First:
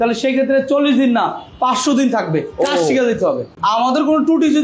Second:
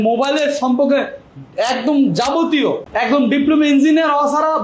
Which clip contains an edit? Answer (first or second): first